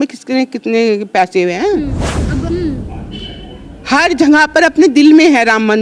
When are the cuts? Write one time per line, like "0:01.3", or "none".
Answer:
0:02.3